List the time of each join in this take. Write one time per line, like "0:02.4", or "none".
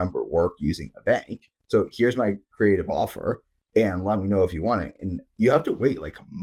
none